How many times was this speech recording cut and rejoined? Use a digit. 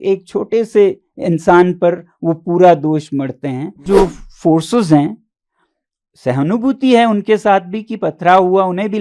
1